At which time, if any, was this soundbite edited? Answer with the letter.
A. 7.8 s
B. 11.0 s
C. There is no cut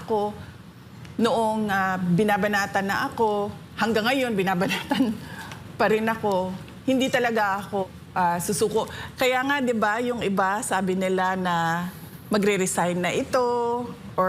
A